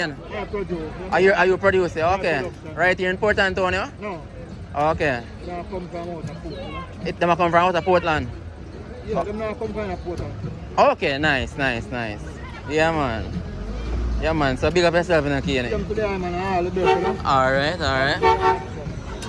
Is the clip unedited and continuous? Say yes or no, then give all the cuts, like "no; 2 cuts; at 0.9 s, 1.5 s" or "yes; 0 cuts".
yes; 0 cuts